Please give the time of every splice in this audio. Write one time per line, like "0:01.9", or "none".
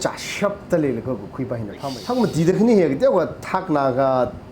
0:01.9